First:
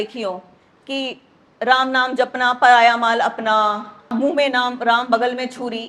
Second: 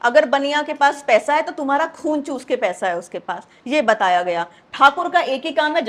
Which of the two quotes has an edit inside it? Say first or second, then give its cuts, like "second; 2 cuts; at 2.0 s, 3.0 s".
first; 1 cut; at 4.1 s